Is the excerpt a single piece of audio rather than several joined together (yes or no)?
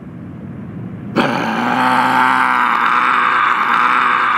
no